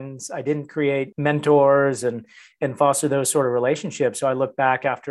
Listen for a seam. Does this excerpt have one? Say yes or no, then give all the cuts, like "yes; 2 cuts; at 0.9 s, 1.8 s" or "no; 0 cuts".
yes; 1 cut; at 1.1 s